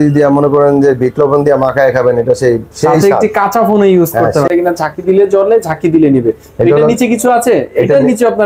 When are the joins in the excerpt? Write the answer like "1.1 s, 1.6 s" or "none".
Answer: 4.5 s